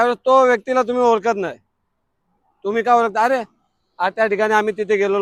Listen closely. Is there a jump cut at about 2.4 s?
no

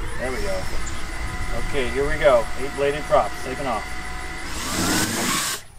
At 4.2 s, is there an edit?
no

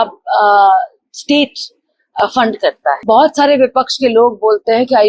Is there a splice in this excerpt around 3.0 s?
yes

